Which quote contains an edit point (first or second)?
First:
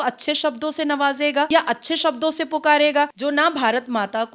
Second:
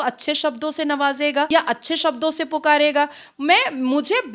first